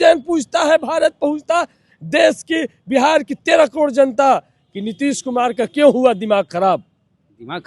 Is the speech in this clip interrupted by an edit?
no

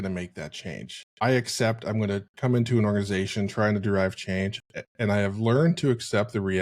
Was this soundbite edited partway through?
no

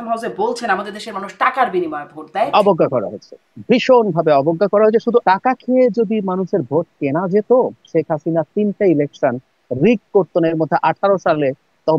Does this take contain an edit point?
yes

